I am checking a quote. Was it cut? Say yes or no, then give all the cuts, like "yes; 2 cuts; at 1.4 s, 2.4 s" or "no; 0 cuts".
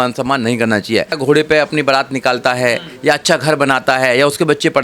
yes; 1 cut; at 1.2 s